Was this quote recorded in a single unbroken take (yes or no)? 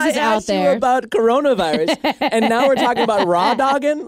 yes